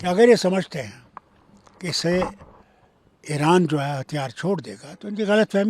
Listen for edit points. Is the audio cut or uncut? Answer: uncut